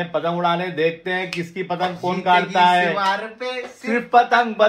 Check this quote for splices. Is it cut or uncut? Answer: uncut